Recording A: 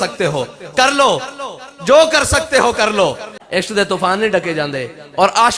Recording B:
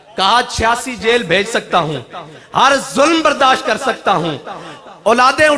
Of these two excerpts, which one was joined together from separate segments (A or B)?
A